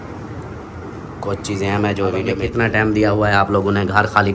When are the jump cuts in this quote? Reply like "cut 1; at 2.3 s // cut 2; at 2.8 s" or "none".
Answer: cut 1; at 2.3 s

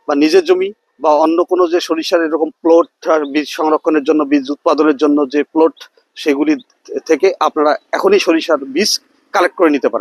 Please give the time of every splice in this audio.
none

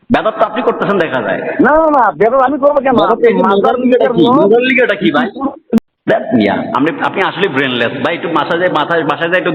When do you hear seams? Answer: cut 1; at 5.8 s

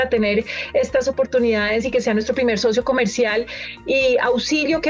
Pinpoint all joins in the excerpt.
none

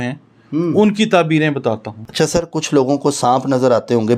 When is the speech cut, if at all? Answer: cut 1; at 2.0 s

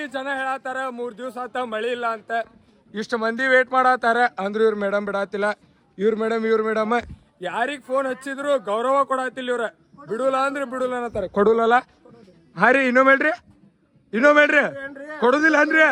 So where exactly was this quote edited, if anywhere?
none

